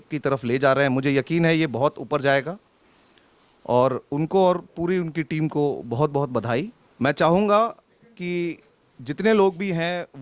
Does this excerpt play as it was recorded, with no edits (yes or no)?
no